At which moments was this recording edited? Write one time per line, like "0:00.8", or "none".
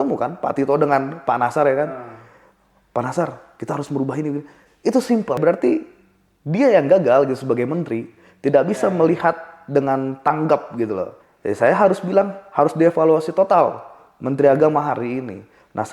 0:05.4
0:11.2